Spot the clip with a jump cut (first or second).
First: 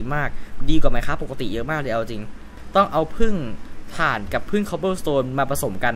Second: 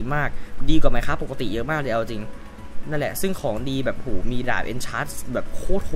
first